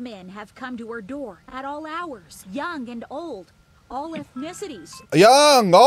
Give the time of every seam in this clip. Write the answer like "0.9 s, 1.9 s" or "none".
2.3 s, 4.9 s